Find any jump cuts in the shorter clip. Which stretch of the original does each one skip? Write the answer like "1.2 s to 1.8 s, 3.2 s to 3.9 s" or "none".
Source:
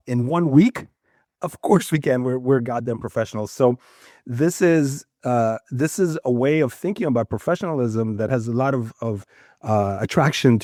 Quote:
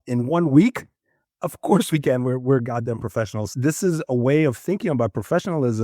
3.5 s to 5.6 s